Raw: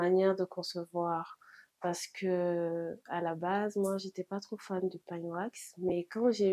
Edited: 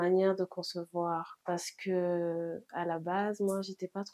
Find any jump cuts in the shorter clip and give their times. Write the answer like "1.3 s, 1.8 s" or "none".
1.3 s